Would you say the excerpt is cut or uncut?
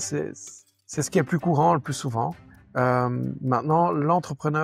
uncut